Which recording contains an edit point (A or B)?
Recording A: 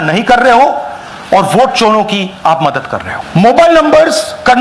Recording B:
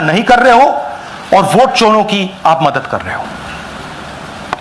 A